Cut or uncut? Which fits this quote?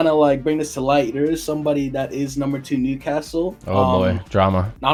uncut